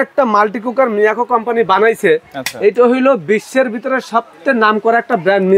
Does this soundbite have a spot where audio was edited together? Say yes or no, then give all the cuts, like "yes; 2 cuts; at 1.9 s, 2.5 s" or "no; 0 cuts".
no; 0 cuts